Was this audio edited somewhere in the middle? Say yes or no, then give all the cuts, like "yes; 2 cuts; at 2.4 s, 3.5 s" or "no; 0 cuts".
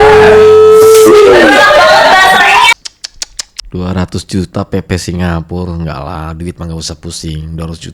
yes; 1 cut; at 2.7 s